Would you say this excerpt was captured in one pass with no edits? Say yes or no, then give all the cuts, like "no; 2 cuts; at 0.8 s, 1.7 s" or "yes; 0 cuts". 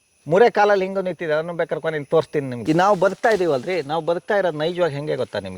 no; 1 cut; at 2.5 s